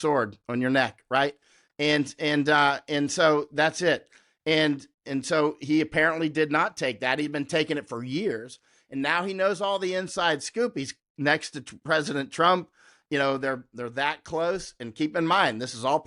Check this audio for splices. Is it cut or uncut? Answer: uncut